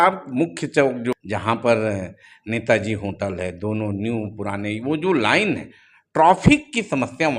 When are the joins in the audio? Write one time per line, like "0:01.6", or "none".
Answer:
0:01.1

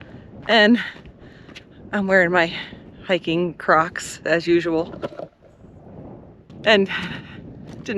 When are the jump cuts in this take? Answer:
0:06.5

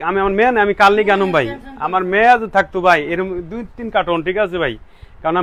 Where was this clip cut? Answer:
none

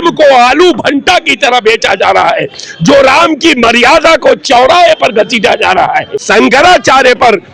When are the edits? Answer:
0:06.2

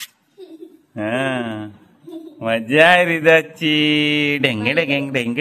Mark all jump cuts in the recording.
none

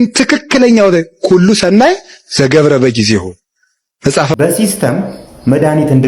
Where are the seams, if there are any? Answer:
0:04.3

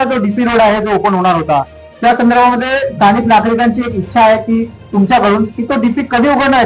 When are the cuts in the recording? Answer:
none

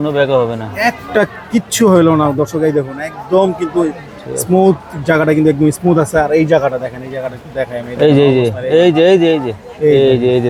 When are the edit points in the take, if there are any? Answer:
none

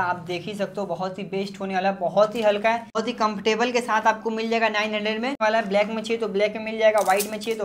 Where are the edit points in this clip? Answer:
0:03.0
0:05.4

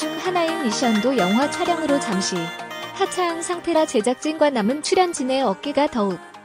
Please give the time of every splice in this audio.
none

